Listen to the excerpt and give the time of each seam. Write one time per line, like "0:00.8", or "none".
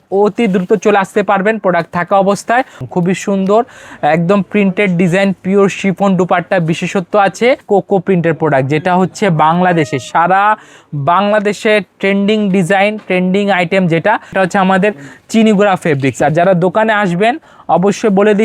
0:02.8
0:07.6
0:14.3